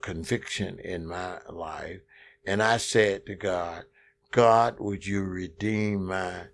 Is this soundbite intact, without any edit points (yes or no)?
yes